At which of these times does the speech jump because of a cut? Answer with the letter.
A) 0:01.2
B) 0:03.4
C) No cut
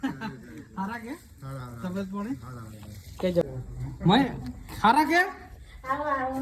B